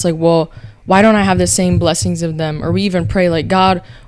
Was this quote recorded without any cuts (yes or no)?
yes